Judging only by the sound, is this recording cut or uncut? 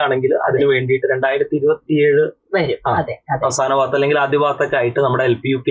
uncut